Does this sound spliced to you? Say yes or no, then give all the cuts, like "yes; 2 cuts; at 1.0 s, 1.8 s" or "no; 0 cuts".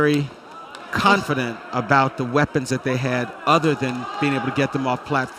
no; 0 cuts